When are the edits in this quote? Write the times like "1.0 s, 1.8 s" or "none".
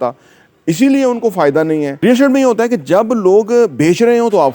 1.9 s